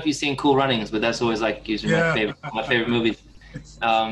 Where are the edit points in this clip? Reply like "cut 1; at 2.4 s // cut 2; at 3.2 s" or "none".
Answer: none